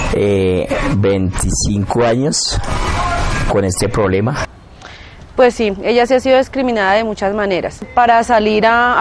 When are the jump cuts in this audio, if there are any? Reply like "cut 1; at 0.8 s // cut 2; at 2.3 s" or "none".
cut 1; at 4.4 s // cut 2; at 7.8 s